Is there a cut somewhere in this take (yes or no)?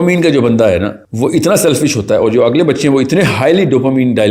yes